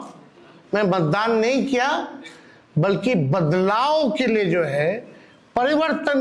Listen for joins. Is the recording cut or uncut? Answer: uncut